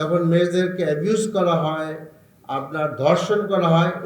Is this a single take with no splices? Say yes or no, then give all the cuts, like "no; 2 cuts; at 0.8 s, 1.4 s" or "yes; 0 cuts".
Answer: yes; 0 cuts